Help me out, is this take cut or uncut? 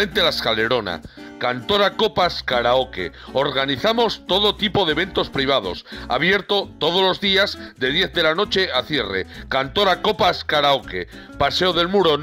uncut